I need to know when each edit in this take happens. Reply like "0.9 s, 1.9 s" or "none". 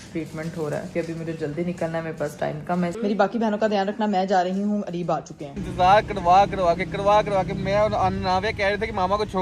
0.9 s, 2.9 s, 5.6 s